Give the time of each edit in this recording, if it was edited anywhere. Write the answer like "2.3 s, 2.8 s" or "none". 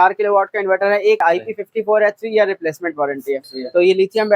1.2 s, 3.5 s